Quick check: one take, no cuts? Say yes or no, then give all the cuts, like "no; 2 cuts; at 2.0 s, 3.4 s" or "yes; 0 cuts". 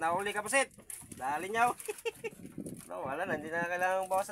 yes; 0 cuts